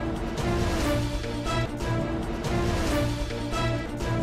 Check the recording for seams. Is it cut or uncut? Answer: uncut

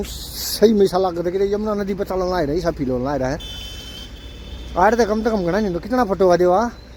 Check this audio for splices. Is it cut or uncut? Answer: uncut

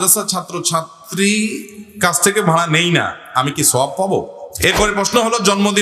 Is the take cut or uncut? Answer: cut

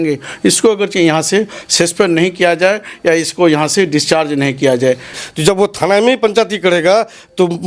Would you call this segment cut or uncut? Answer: cut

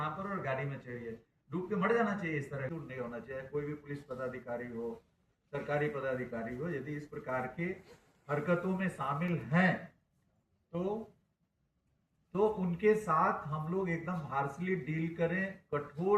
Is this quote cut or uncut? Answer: cut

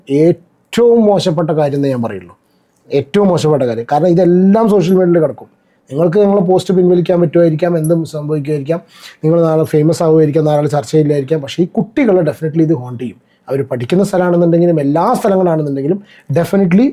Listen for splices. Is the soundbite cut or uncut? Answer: uncut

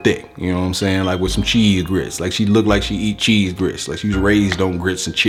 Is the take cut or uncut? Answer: uncut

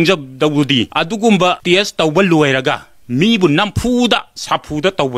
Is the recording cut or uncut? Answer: cut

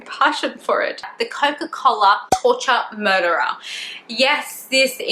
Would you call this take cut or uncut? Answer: cut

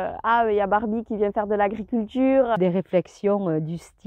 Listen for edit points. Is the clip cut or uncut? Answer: cut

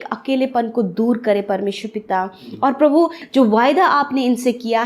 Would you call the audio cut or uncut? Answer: cut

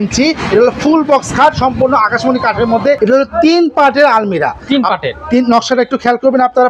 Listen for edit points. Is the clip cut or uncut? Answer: cut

